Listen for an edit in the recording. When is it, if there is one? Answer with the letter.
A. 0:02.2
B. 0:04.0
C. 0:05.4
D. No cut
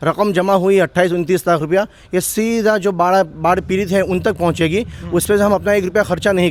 D